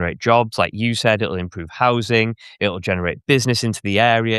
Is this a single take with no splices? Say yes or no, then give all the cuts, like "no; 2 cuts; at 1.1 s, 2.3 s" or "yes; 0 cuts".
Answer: yes; 0 cuts